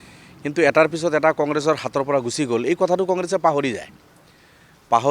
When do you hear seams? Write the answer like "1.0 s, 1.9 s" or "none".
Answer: none

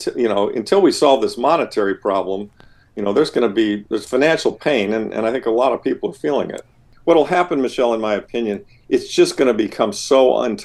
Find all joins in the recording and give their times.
6.8 s

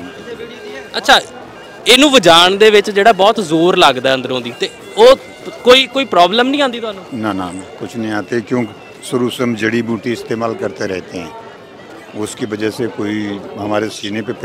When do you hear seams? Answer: none

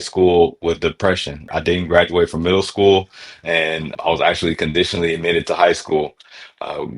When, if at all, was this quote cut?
1.5 s, 3.9 s

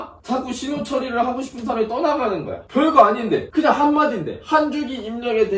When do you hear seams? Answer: 3.5 s

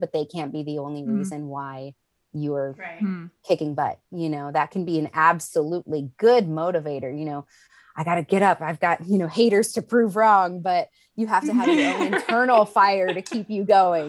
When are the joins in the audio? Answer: none

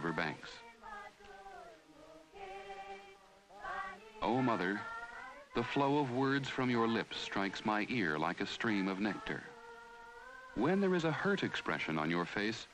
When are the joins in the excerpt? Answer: 8.5 s

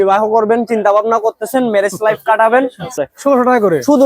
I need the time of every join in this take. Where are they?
3.0 s

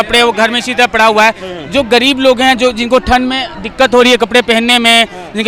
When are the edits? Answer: none

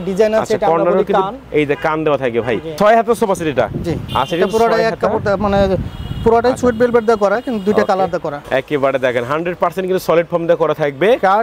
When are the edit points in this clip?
2.7 s, 8.4 s

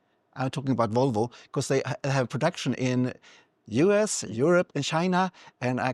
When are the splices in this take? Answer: none

